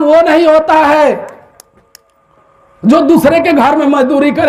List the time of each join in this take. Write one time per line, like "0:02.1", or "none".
none